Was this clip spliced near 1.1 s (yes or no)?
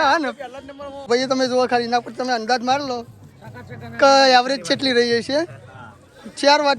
yes